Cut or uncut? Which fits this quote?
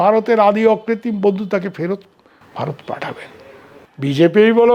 uncut